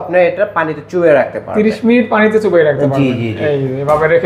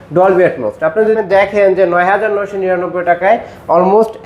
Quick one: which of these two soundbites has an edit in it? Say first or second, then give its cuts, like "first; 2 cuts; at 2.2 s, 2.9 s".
second; 1 cut; at 1.2 s